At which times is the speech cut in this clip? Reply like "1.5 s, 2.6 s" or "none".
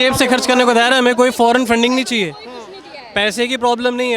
none